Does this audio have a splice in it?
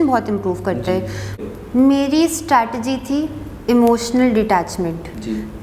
yes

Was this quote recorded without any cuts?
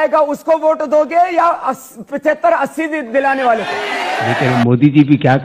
no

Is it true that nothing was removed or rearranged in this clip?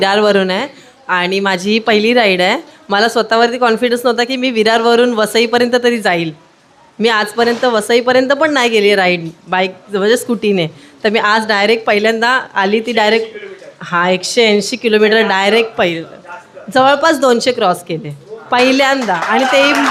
yes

